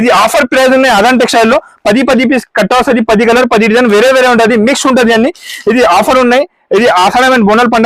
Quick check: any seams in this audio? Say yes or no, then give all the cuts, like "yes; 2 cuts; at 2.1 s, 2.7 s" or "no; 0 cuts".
no; 0 cuts